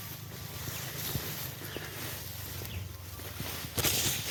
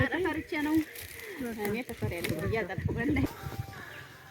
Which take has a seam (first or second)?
second